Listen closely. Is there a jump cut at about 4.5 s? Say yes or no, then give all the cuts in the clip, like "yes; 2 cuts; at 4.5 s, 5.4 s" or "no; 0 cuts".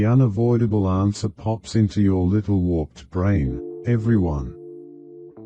yes; 1 cut; at 4.5 s